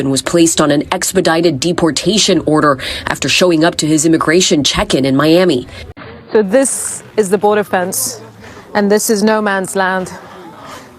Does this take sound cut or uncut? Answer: cut